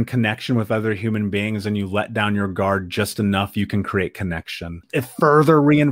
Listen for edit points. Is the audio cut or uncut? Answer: cut